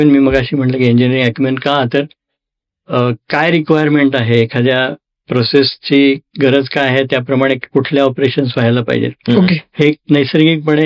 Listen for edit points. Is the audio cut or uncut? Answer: uncut